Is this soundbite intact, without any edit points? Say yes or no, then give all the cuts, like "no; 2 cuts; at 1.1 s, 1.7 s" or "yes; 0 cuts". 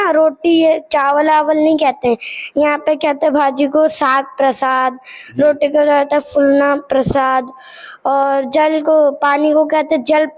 yes; 0 cuts